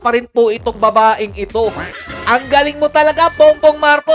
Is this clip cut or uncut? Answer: cut